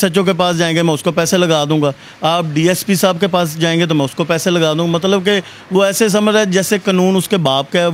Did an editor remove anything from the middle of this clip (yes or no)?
no